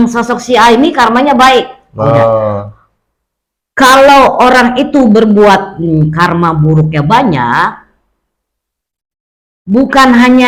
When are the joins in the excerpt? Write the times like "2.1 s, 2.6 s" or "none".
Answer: none